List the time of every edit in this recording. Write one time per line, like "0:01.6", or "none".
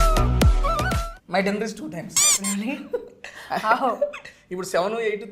0:01.1

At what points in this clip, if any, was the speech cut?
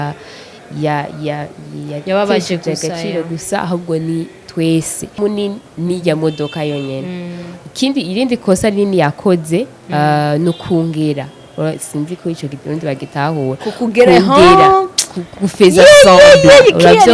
0:05.2

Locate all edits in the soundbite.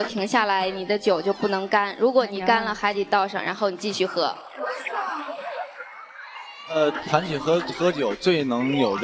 none

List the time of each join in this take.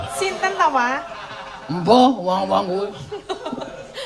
0:01.8

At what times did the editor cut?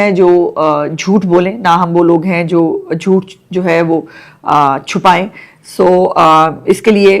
none

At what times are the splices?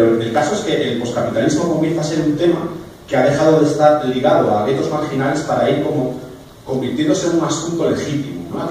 none

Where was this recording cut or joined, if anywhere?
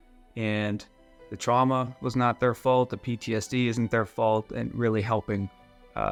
none

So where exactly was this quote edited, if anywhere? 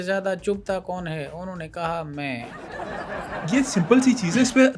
0:03.0

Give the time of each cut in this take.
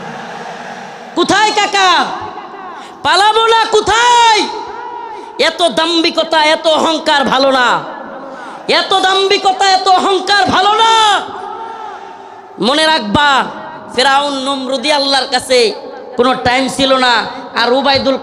none

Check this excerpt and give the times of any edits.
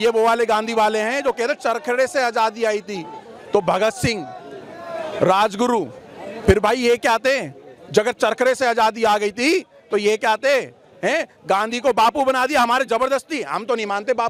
none

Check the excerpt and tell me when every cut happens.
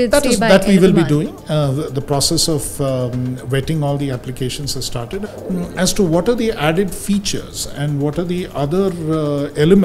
0:05.3

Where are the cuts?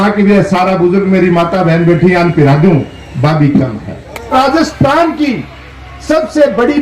0:04.3

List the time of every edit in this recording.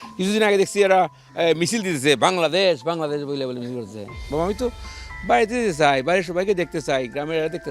0:04.2

